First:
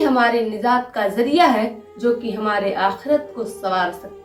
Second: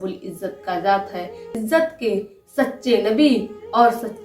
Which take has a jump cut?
second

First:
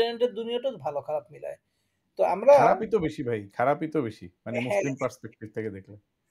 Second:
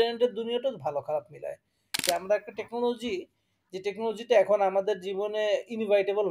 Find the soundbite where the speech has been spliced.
second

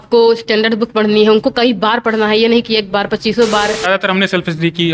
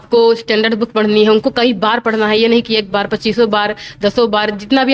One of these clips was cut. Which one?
first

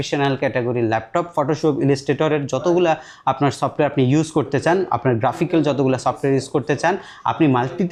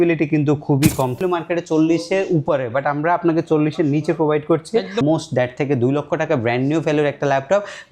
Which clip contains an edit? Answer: second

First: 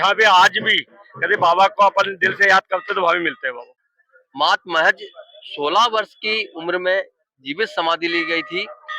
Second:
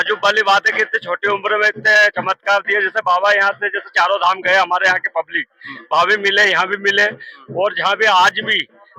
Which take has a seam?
first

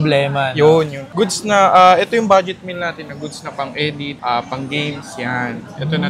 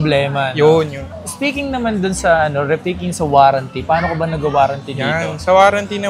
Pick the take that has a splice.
first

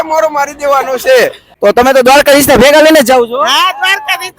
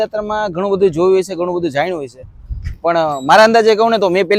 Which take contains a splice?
first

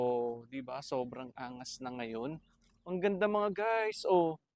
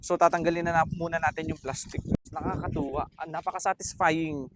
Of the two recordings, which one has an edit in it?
second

